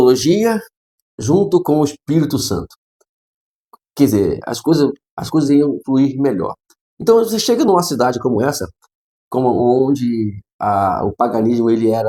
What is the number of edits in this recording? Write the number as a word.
zero